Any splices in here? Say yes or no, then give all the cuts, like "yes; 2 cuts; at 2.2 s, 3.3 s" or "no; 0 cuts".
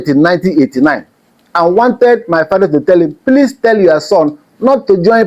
no; 0 cuts